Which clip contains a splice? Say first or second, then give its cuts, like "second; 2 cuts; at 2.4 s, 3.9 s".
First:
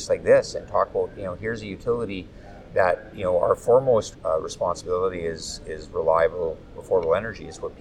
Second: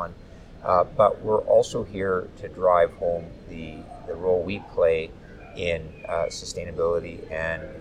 first; 1 cut; at 4.1 s